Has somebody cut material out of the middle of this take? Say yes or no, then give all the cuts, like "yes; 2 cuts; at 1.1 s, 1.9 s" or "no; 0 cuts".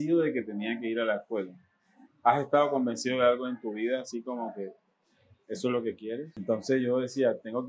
yes; 1 cut; at 6.3 s